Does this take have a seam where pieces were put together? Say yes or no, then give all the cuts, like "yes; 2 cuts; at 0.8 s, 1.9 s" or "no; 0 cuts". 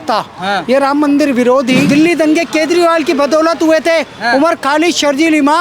yes; 1 cut; at 1.9 s